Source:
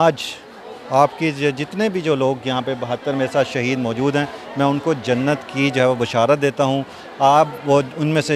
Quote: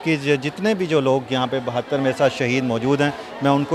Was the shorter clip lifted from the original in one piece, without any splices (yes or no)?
yes